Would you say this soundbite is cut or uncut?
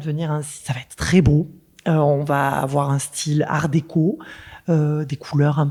uncut